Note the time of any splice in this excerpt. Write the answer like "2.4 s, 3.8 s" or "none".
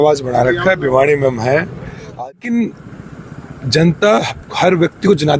2.2 s

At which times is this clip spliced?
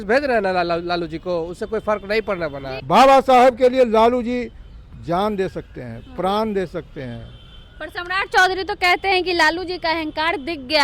2.7 s

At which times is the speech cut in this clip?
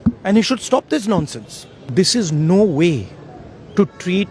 1.8 s

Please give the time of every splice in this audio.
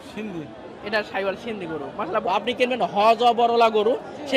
2.3 s

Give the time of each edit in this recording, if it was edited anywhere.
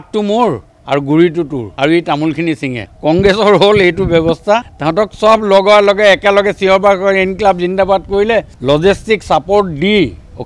1.6 s, 4.8 s, 8.5 s

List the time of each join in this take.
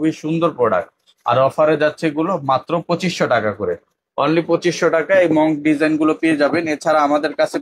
none

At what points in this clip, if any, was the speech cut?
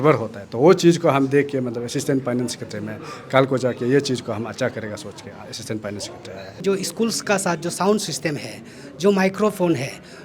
6.6 s

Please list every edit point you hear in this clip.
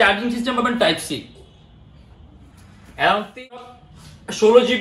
3.6 s

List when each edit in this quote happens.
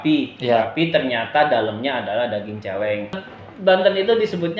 3.3 s

